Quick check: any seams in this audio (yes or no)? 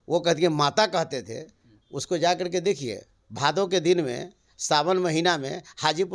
no